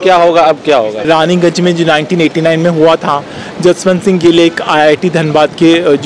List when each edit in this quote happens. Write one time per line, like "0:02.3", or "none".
0:01.0